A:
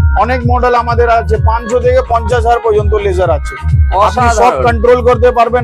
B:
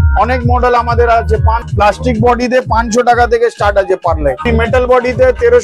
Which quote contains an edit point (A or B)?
B